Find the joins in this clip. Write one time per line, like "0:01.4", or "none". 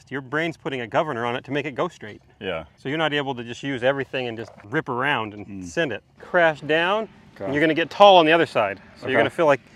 0:02.7
0:04.5
0:06.2

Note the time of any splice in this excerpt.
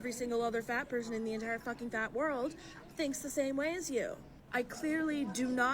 0:04.7

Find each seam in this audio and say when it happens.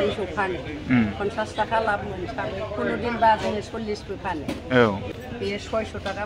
0:05.1

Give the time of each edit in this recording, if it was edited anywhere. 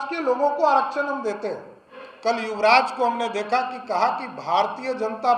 0:02.1

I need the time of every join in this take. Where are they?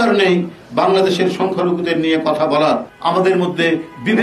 0:02.9

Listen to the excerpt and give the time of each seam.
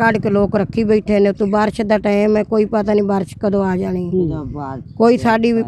none

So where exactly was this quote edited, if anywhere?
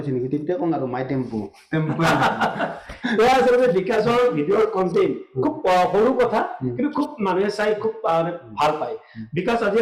none

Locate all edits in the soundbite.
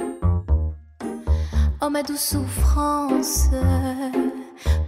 0:01.5

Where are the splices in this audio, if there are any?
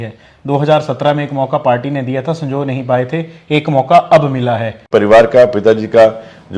0:04.8

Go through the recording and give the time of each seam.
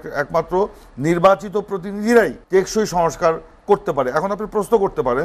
0:02.4

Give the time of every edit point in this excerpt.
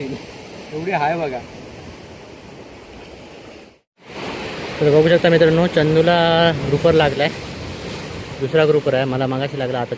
0:03.9

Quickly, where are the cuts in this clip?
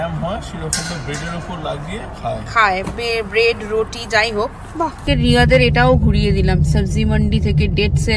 0:05.0

